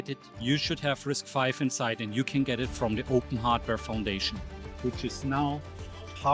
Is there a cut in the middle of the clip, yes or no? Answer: no